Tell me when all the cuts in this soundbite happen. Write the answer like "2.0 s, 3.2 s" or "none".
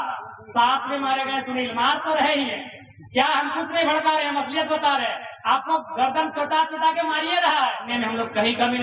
7.9 s